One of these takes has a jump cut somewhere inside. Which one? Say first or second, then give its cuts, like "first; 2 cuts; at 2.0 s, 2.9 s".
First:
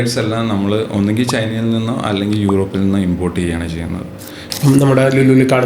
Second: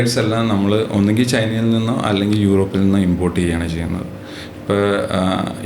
first; 1 cut; at 4.5 s